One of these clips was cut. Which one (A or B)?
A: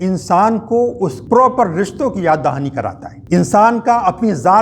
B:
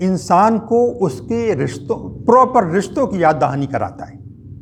A